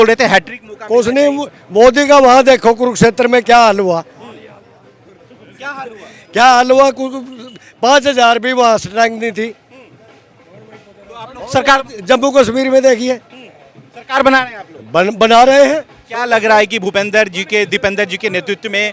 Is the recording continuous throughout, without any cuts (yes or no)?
yes